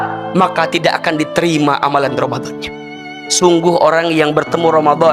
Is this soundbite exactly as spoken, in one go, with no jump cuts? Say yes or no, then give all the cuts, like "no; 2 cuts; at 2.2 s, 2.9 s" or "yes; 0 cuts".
no; 1 cut; at 3.0 s